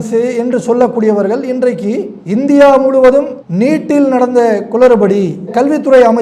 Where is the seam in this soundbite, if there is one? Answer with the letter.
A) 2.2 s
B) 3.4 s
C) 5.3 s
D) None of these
D